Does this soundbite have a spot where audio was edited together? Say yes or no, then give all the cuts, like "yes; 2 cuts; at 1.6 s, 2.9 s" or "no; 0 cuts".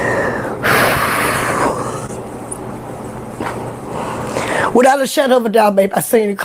no; 0 cuts